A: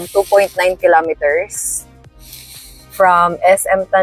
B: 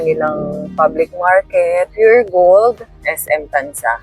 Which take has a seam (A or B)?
B